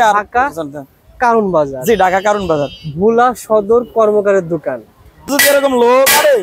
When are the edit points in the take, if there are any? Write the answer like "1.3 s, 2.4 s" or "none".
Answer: 5.3 s